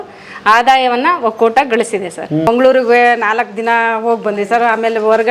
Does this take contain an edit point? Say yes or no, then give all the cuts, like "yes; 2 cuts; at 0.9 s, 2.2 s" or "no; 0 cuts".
yes; 1 cut; at 2.5 s